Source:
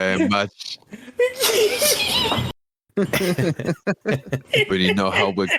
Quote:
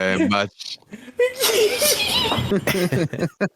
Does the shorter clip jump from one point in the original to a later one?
yes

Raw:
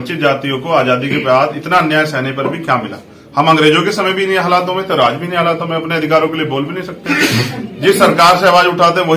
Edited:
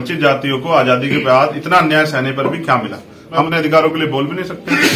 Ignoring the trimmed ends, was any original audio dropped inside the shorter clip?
yes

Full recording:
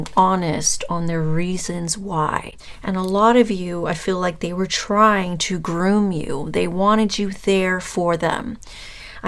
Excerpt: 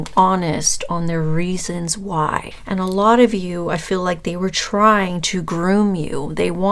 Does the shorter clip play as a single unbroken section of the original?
no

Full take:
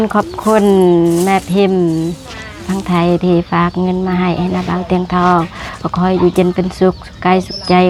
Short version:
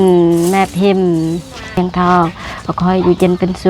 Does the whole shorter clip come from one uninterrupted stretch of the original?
no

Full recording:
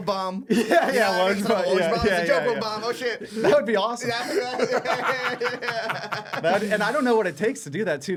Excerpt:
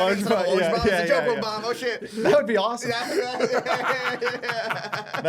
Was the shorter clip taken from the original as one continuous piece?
yes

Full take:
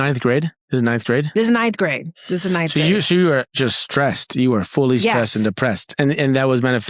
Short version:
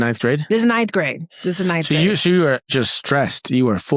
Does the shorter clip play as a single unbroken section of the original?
yes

